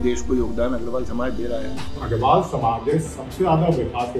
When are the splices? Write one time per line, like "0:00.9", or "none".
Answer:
0:02.0